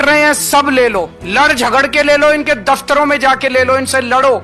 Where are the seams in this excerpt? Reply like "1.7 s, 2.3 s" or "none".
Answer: 1.2 s